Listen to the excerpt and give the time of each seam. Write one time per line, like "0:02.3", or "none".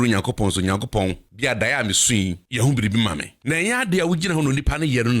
0:01.3
0:02.4
0:03.3